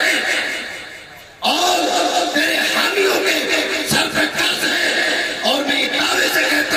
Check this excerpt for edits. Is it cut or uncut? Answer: uncut